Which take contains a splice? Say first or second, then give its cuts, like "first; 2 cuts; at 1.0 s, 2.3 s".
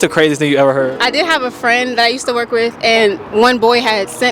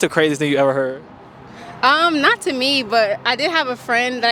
first; 1 cut; at 1.0 s